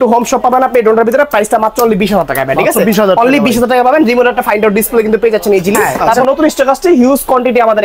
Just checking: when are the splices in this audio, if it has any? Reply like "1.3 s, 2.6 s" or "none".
6.2 s